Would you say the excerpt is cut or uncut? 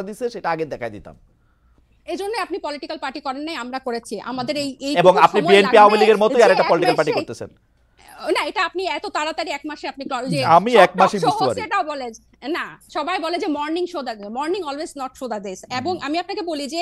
uncut